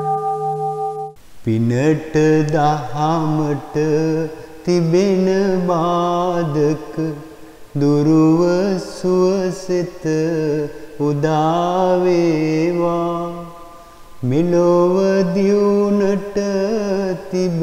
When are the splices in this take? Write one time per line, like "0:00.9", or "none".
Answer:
0:01.1